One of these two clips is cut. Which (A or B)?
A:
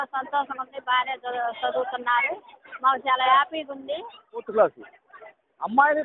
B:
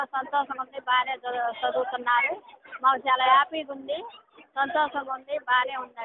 A